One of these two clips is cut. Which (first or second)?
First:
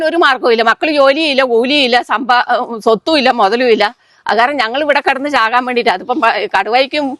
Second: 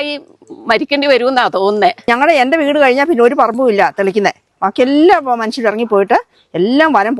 second